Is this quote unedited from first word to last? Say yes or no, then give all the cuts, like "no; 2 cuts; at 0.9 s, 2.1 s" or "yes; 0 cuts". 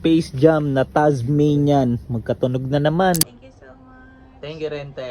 no; 1 cut; at 3.2 s